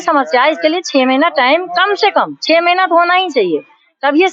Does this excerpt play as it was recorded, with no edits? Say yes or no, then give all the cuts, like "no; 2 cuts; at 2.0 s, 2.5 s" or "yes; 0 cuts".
yes; 0 cuts